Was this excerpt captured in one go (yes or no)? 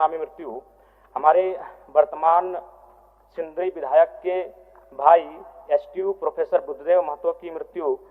yes